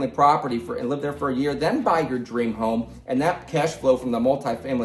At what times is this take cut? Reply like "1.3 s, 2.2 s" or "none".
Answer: none